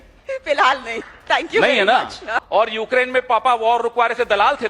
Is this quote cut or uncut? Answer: cut